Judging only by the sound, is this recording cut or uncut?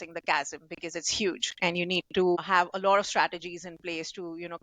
cut